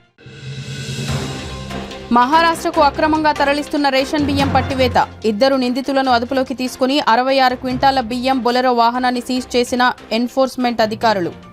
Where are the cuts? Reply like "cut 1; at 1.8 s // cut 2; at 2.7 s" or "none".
none